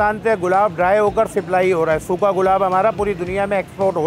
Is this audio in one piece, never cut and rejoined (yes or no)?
yes